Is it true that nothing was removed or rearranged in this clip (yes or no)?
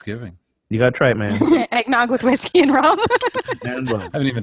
yes